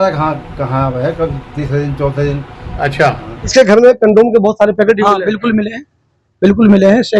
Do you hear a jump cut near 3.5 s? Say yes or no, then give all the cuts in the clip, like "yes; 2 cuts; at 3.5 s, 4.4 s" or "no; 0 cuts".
yes; 1 cut; at 3.5 s